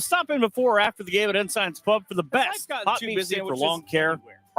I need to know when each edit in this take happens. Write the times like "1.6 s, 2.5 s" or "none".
3.1 s